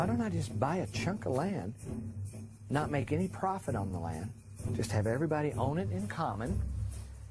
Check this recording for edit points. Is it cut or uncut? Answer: cut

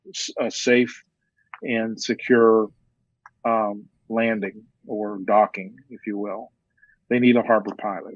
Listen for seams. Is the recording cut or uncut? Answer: uncut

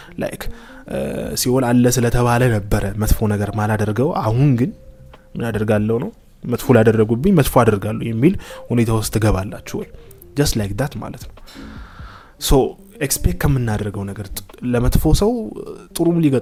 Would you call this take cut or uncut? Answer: uncut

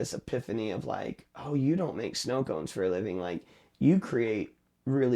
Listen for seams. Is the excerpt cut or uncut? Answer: uncut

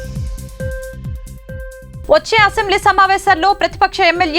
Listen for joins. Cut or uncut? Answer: uncut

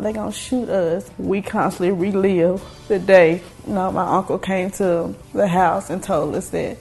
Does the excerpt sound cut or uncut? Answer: cut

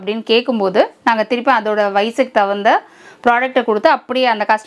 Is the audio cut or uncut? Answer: uncut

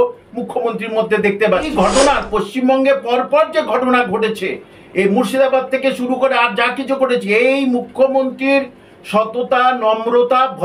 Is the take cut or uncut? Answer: cut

